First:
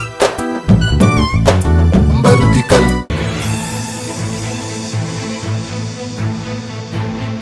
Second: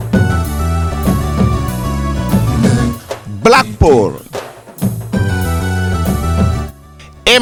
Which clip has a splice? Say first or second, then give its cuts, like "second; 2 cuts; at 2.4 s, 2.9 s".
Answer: first; 1 cut; at 3.1 s